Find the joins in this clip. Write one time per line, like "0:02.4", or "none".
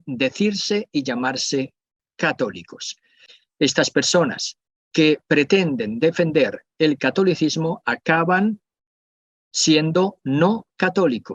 0:03.4